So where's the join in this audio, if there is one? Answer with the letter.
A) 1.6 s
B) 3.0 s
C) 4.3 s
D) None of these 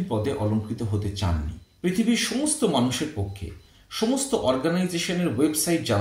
A